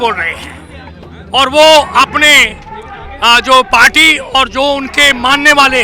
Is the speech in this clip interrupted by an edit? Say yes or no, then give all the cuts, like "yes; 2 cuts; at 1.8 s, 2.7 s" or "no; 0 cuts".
no; 0 cuts